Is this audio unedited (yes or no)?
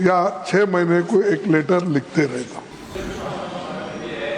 no